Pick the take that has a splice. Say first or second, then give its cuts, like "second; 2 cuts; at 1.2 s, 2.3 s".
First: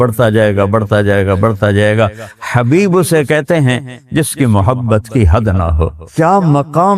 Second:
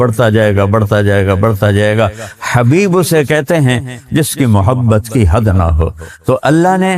first; 1 cut; at 6.0 s